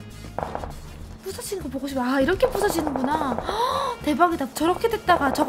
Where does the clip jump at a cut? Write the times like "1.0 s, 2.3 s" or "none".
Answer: 4.5 s